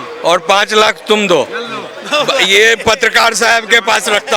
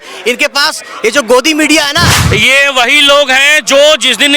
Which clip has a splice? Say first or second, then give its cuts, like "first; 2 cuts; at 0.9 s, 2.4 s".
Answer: second; 1 cut; at 2.2 s